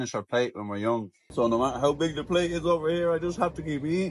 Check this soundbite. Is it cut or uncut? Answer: cut